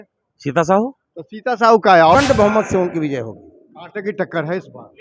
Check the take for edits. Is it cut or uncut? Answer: cut